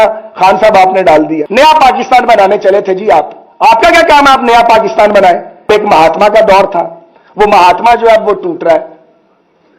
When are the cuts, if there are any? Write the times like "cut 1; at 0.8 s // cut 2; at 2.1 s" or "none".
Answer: cut 1; at 1.4 s // cut 2; at 5.7 s